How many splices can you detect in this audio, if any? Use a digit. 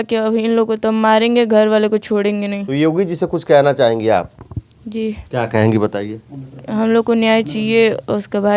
1